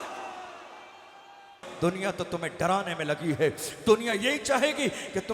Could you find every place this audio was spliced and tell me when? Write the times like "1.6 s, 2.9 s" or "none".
1.7 s